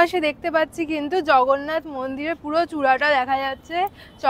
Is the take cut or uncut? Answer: uncut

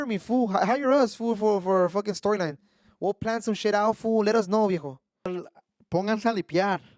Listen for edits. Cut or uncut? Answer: cut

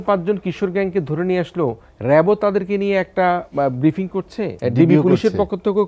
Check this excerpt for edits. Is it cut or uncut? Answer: cut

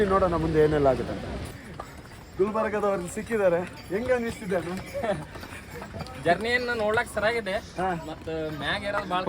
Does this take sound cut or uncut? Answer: cut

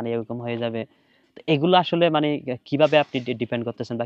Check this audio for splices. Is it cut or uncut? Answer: uncut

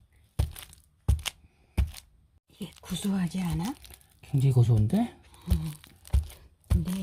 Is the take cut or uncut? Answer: cut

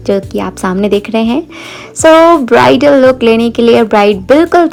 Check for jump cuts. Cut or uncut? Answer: uncut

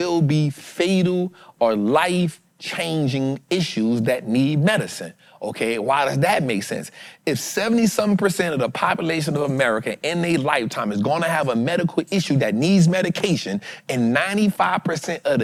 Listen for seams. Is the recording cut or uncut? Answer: uncut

